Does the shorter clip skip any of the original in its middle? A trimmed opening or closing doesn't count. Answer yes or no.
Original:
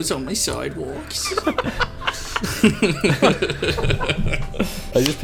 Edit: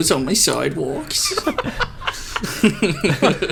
no